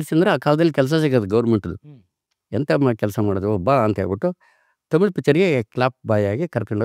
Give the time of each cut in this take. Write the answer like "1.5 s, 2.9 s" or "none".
none